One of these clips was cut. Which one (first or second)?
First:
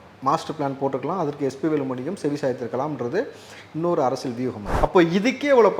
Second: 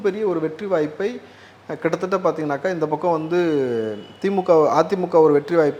first